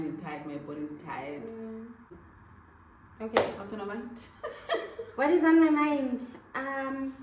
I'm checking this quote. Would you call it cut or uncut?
cut